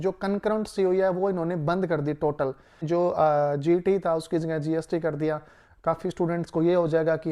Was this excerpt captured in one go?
no; 1 cut; at 2.8 s

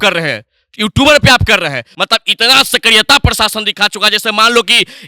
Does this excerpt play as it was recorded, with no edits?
no; 1 cut; at 1.8 s

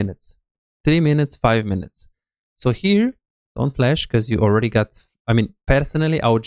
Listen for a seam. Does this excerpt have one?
no; 0 cuts

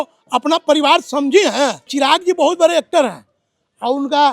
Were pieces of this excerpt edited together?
yes; 1 cut; at 1.8 s

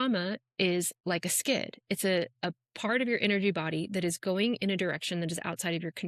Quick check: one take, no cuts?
yes; 0 cuts

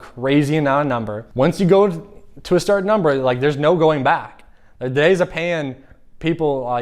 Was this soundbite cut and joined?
yes; 1 cut; at 1.2 s

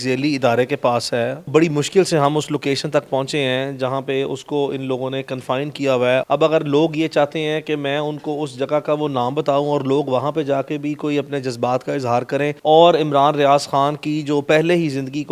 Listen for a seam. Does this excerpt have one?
yes; 3 cuts; at 1.5 s, 6.2 s, 12.6 s

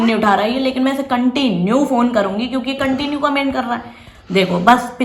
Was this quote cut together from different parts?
no; 0 cuts

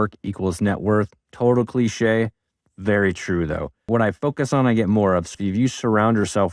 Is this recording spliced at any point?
yes; 2 cuts; at 3.8 s, 5.3 s

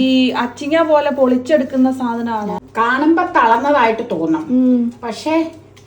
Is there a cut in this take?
yes; 1 cut; at 2.6 s

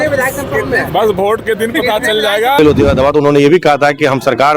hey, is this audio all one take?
no; 1 cut; at 2.6 s

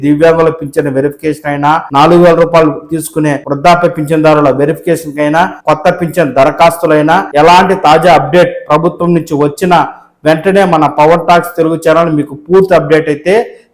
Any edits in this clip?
yes; 4 cuts; at 1.9 s, 3.5 s, 5.6 s, 7.3 s

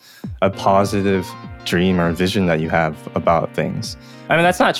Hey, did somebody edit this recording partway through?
yes; 1 cut; at 1.5 s

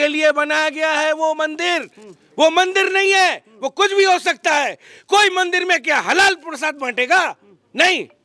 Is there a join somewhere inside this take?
no; 0 cuts

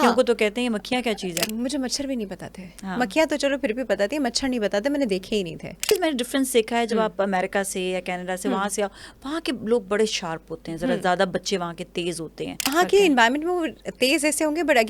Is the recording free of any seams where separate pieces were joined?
no; 3 cuts; at 1.5 s, 5.9 s, 12.7 s

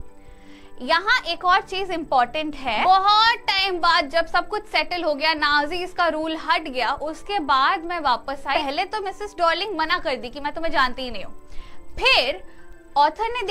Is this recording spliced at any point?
yes; 2 cuts; at 2.8 s, 8.5 s

